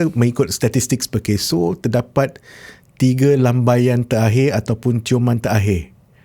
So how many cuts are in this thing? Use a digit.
0